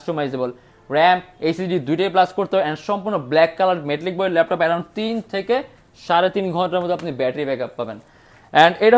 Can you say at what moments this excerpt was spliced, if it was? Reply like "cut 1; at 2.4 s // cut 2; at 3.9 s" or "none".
none